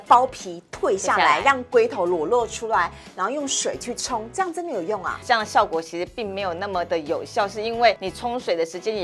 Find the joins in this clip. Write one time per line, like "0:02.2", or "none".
0:05.2
0:08.1